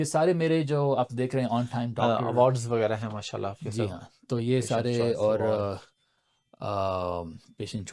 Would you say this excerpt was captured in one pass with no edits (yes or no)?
yes